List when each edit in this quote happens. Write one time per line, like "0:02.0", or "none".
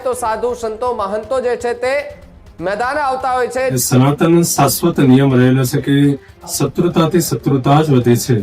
0:03.7